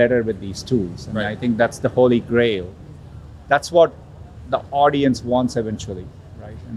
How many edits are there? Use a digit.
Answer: 0